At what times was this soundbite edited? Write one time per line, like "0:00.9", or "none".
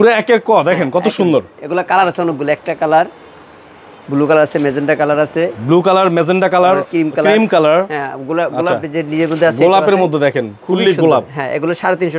none